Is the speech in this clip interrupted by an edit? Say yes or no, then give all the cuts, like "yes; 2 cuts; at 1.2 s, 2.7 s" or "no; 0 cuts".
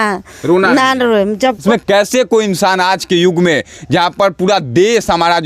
yes; 1 cut; at 1.6 s